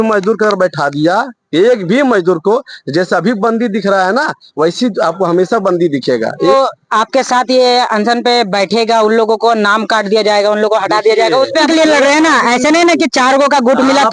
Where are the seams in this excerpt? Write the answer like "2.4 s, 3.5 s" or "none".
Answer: 6.5 s, 11.7 s